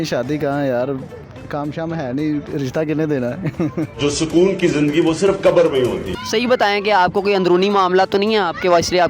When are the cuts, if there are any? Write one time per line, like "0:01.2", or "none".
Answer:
0:06.1